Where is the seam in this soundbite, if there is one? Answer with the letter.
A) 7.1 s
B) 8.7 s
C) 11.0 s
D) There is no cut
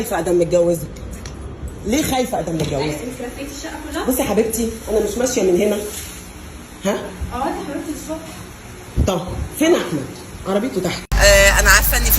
C